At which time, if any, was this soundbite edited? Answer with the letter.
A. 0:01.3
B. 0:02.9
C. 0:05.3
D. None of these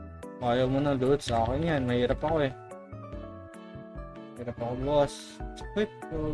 D